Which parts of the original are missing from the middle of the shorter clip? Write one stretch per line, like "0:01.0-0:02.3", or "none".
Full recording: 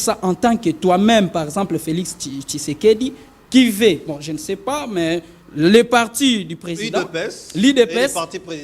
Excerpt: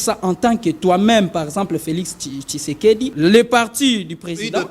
0:03.1-0:05.5